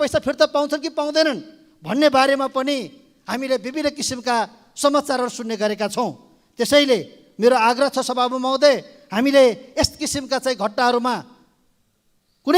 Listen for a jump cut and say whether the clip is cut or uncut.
uncut